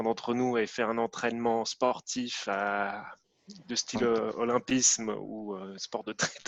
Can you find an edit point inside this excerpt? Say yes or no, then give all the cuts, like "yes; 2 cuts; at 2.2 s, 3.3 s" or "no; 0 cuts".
no; 0 cuts